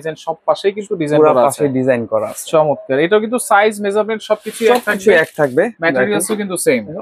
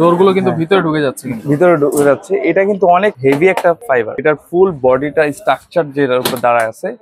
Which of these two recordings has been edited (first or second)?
second